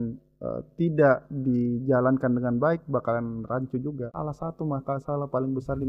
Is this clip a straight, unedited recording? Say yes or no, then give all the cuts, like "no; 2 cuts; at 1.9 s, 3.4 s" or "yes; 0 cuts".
no; 1 cut; at 4.1 s